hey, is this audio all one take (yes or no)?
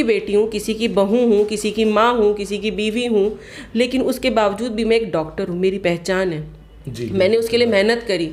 yes